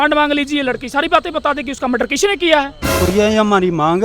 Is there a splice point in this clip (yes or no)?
yes